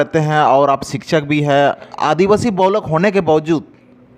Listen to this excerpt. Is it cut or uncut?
cut